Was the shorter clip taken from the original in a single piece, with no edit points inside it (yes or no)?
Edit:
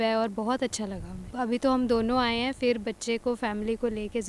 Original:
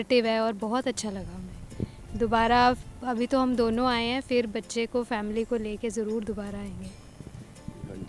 no